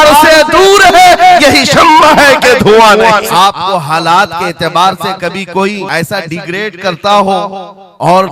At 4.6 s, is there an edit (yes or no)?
no